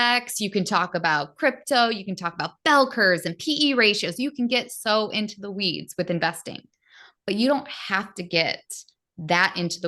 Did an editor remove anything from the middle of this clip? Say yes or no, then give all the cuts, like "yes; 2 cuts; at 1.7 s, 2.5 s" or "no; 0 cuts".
no; 0 cuts